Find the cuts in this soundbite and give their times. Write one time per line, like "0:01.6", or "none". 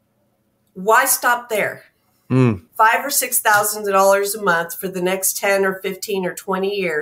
0:02.7